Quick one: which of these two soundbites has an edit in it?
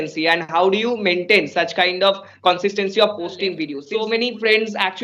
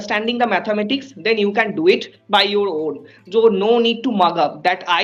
first; 1 cut; at 3.7 s

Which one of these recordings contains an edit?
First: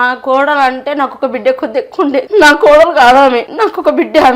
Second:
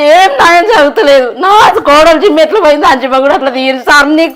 first; 2 cuts; at 2.3 s, 3.5 s

